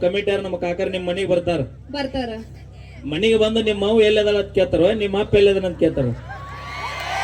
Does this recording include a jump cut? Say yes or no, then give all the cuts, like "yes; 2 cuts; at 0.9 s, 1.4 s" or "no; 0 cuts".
no; 0 cuts